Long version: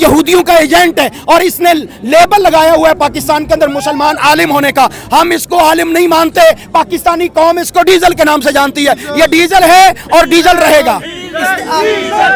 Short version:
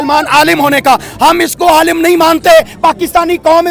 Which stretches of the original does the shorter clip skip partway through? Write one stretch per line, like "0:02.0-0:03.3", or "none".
none

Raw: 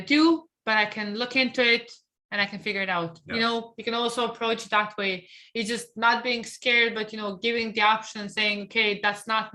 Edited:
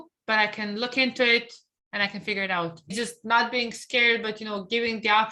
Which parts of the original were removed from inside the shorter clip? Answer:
0:03.3-0:05.6

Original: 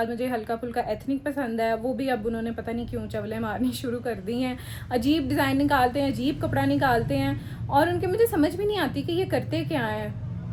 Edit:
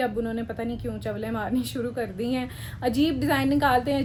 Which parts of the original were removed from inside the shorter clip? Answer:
none

